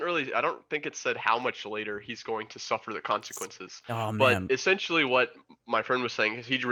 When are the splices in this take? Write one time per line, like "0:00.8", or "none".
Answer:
none